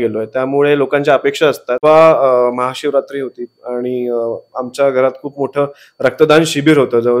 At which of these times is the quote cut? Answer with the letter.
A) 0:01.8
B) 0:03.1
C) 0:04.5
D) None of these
A